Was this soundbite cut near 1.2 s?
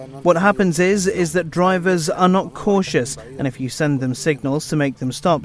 no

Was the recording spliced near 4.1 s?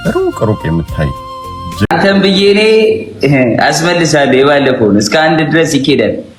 no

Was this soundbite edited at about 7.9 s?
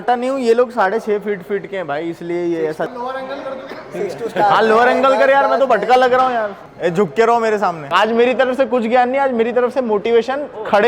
yes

